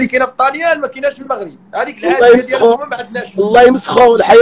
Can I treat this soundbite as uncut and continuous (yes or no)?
yes